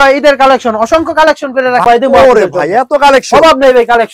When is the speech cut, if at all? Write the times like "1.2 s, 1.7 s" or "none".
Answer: 1.8 s